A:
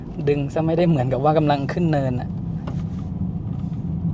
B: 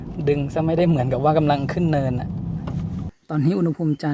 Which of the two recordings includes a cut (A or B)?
B